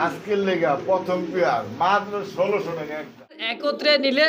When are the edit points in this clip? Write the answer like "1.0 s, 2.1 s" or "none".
3.4 s